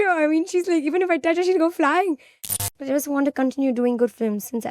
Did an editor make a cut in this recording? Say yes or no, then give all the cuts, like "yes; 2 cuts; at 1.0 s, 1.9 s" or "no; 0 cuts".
yes; 1 cut; at 2.6 s